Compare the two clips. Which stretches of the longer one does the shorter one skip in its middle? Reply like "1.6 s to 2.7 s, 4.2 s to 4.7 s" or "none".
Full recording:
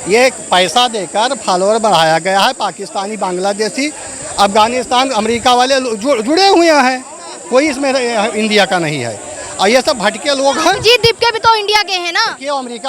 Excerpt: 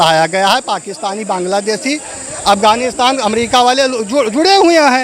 none